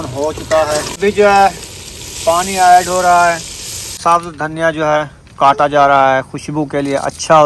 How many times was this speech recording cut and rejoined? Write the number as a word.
two